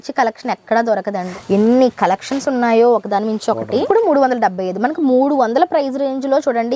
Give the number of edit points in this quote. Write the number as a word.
two